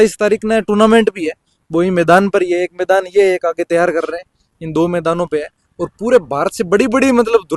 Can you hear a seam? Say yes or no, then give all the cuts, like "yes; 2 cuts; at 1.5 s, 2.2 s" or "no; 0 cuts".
no; 0 cuts